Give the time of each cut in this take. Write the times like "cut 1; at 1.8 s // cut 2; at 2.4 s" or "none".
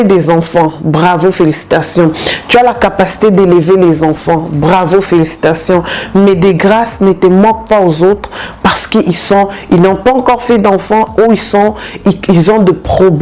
none